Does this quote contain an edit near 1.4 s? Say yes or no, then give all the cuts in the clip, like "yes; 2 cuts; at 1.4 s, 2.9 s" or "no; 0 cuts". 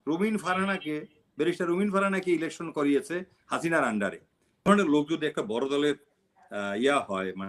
no; 1 cut; at 4.6 s